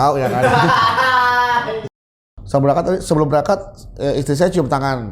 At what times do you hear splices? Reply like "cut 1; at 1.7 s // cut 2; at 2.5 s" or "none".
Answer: cut 1; at 1.9 s